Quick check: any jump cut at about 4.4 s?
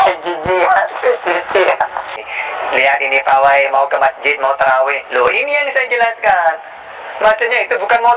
no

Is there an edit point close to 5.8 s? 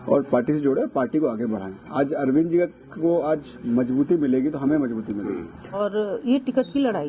yes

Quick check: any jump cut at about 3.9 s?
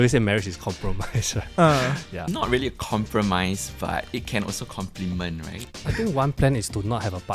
no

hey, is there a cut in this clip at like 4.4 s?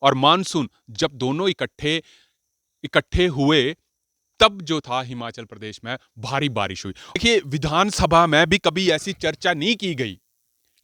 no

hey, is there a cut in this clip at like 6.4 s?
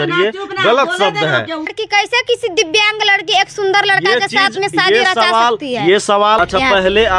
yes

